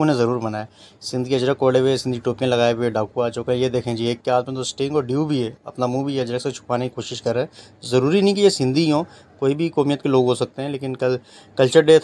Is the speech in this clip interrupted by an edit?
no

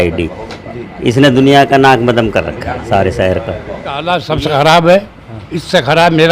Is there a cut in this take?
yes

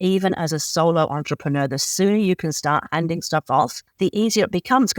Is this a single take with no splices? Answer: no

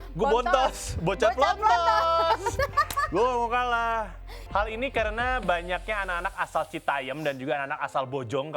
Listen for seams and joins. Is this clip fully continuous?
no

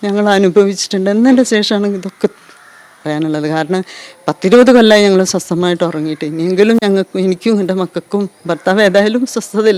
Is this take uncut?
no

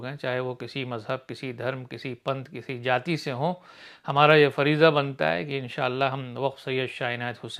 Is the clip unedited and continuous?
yes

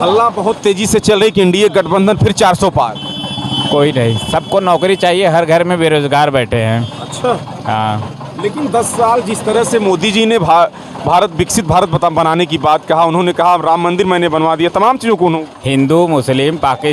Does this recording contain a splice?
no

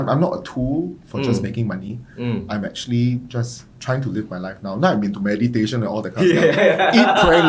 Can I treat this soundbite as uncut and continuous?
yes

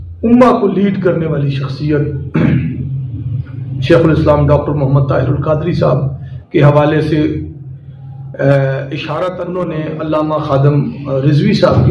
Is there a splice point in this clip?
yes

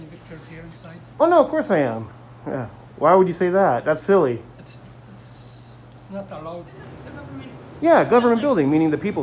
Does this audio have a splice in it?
yes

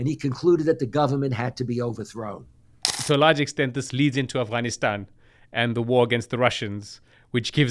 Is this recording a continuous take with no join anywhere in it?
no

